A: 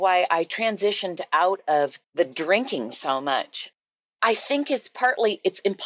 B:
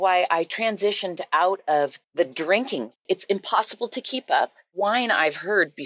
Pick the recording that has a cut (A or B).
B